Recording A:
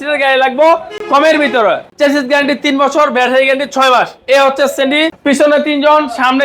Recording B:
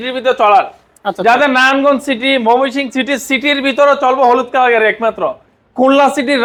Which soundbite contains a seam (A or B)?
A